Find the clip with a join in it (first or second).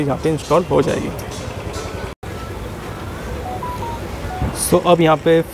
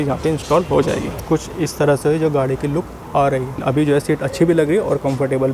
second